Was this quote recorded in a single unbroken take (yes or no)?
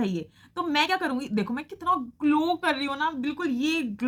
yes